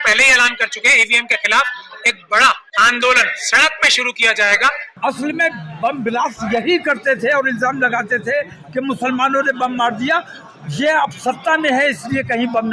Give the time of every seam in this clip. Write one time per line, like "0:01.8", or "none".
0:02.7
0:04.8